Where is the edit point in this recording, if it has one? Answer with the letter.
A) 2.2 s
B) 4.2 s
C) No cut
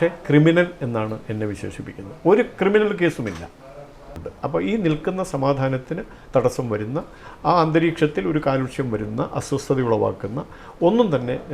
B